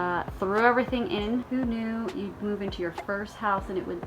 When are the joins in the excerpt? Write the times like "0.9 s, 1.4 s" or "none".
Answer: 1.4 s